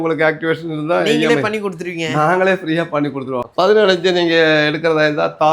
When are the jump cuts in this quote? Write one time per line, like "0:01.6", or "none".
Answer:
0:03.5